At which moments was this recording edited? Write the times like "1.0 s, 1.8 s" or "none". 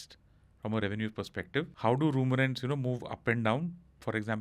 1.7 s